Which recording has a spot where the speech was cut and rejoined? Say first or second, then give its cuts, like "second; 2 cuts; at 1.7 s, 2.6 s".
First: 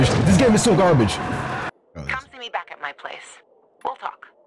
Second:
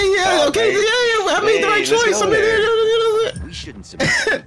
first; 1 cut; at 1.7 s